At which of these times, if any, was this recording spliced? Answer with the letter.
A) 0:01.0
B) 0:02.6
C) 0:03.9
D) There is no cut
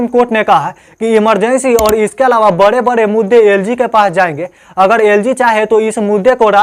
D